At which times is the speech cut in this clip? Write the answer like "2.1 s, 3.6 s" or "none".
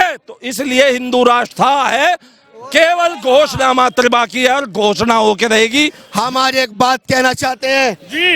6.0 s